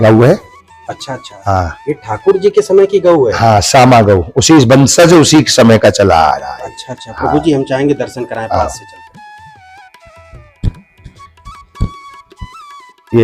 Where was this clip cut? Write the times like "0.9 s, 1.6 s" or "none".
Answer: none

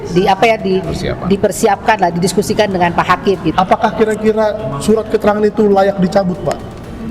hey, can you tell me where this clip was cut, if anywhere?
3.5 s

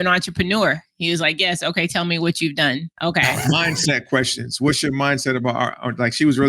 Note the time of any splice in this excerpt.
2.9 s

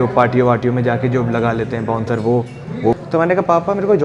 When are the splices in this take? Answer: 2.9 s

